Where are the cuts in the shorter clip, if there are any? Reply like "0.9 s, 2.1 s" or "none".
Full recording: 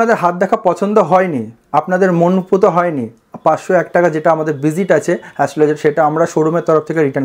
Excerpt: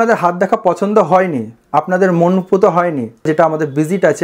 3.2 s